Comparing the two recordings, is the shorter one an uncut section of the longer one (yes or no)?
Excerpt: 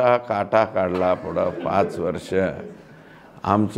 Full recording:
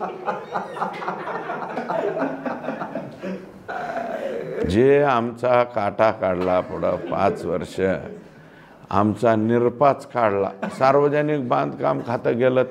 yes